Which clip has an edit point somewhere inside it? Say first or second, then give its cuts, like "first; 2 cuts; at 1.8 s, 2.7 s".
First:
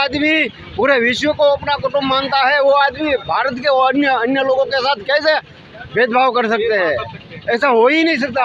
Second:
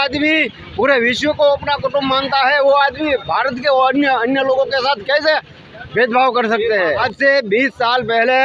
second; 1 cut; at 7.1 s